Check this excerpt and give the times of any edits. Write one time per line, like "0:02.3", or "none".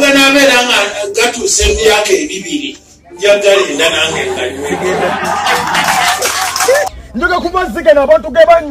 0:07.0